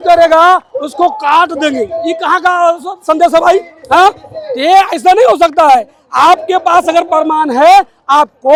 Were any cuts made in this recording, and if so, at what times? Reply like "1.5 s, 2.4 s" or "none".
none